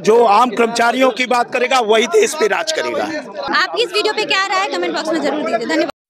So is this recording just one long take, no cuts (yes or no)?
yes